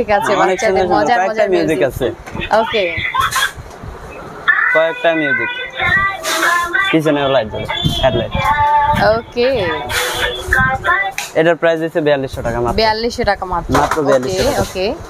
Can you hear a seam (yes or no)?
no